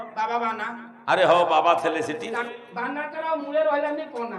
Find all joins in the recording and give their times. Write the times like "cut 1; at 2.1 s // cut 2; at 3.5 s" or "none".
cut 1; at 2.4 s